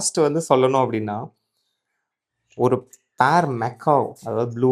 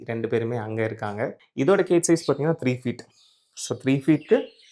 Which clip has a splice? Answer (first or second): second